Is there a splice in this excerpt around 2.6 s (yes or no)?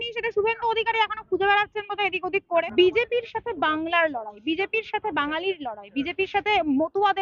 yes